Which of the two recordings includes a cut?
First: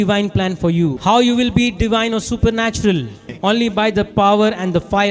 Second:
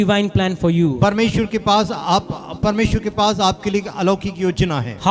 first; 2 cuts; at 1.0 s, 3.3 s

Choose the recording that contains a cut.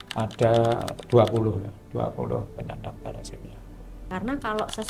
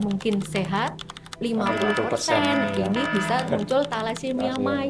first; 1 cut; at 3.9 s

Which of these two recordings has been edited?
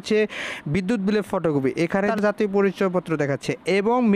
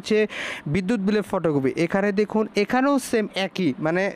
first; 1 cut; at 2.1 s

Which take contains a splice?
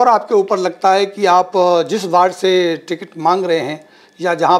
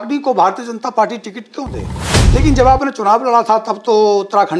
second; 1 cut; at 2.2 s

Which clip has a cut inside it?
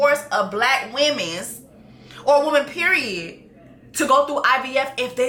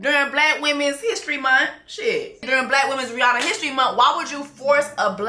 second; 1 cut; at 2.5 s

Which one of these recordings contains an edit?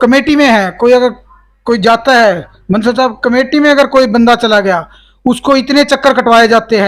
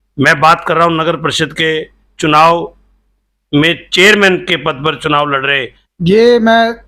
second; 1 cut; at 5.8 s

